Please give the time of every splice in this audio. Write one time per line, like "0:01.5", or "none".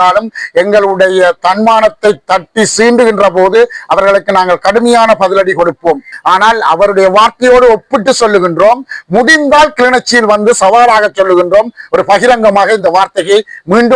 0:06.1

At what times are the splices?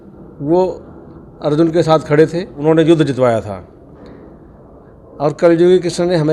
0:02.5

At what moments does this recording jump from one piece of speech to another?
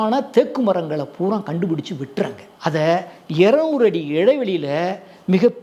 0:02.4

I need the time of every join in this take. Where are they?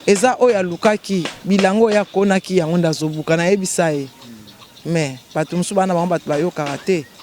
none

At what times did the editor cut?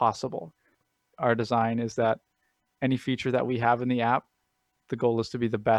none

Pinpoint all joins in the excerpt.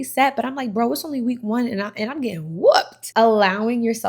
0:03.0

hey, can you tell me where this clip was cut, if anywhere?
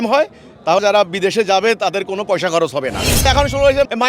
0:03.1

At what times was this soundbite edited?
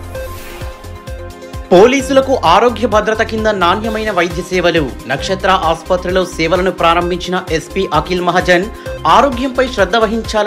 0:01.2

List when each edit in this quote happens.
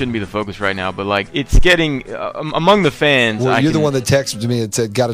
0:01.3

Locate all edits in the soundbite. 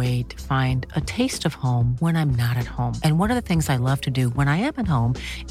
none

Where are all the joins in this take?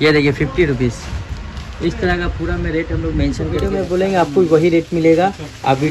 0:03.7

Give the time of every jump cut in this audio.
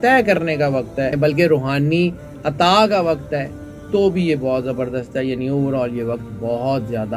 0:01.2

